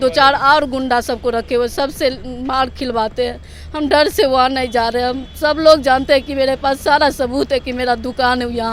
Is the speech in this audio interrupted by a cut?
no; 0 cuts

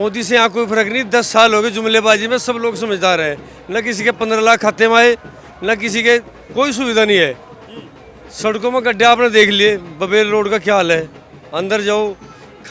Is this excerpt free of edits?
yes; 0 cuts

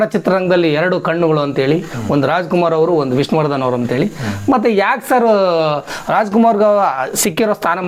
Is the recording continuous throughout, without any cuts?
yes; 0 cuts

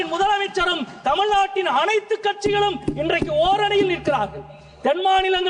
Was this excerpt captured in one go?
yes; 0 cuts

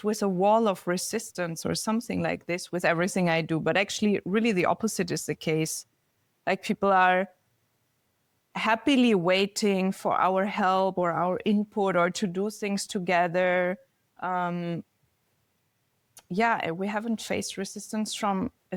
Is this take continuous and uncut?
yes; 0 cuts

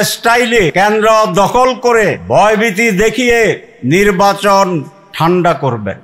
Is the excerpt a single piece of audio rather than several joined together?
no; 4 cuts; at 0.7 s, 2.2 s, 3.7 s, 5.0 s

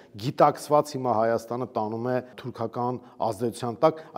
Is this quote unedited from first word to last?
no; 1 cut; at 2.4 s

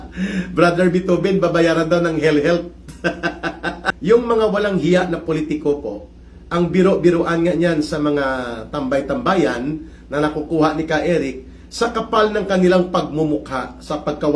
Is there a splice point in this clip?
yes; 1 cut; at 3.9 s

